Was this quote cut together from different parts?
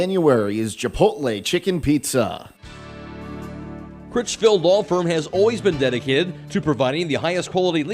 yes; 1 cut; at 2.7 s

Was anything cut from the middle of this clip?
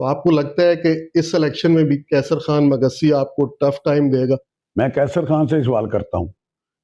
yes; 1 cut; at 4.6 s

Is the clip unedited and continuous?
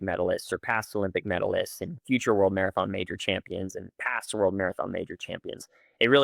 yes; 0 cuts

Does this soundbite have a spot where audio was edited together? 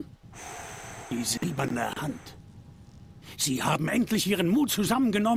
no; 0 cuts

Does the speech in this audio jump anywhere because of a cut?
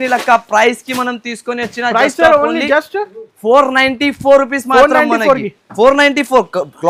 no; 0 cuts

